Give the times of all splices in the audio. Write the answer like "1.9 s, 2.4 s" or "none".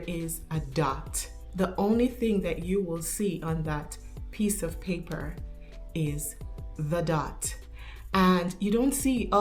1.4 s